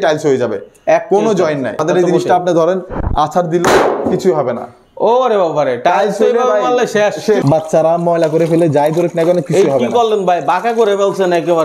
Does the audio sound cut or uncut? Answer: cut